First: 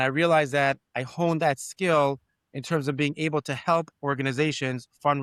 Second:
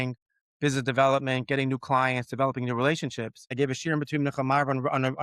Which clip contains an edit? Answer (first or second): second